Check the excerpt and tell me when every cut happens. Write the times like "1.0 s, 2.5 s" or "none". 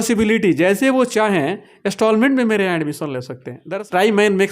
3.5 s